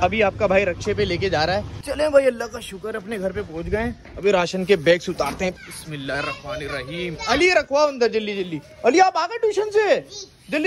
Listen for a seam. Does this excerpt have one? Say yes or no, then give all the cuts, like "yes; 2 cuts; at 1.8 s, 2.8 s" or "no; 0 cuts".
yes; 2 cuts; at 1.8 s, 5.5 s